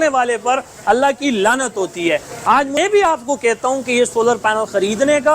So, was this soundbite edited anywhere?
yes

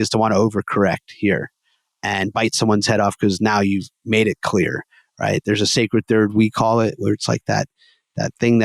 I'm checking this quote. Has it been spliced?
no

